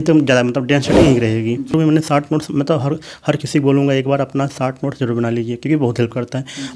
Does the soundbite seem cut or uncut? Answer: cut